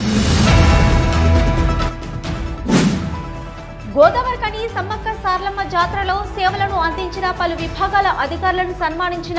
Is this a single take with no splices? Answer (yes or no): no